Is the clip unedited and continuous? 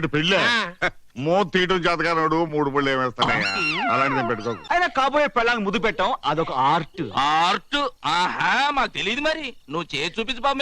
no; 1 cut; at 4.6 s

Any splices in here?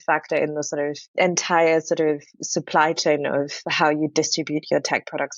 yes; 1 cut; at 1.0 s

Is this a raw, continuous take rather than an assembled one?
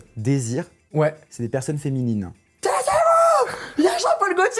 no; 1 cut; at 2.4 s

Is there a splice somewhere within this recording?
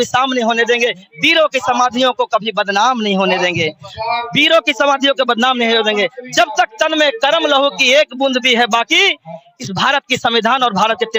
no; 0 cuts

